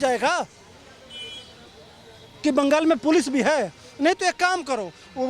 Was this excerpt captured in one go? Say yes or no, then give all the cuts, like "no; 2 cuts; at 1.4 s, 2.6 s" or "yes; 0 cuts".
yes; 0 cuts